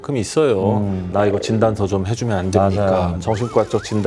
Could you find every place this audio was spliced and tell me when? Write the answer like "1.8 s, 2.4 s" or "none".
1.0 s, 3.2 s